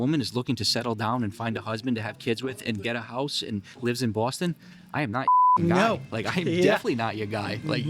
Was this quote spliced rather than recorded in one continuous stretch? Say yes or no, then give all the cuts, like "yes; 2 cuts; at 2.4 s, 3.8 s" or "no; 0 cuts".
no; 0 cuts